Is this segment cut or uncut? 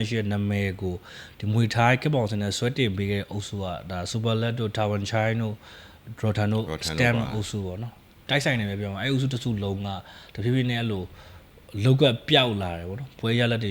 uncut